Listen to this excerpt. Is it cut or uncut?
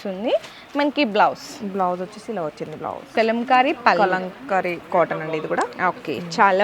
cut